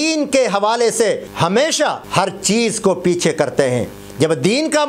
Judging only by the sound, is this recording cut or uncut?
cut